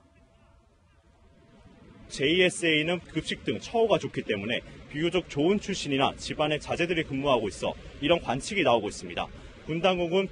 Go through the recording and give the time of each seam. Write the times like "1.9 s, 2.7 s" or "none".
none